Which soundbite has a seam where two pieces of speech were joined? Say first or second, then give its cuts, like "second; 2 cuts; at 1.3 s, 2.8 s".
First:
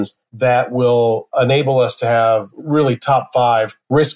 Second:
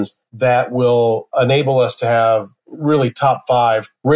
first; 1 cut; at 2.5 s